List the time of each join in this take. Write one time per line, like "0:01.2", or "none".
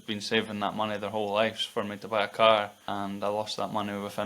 0:02.8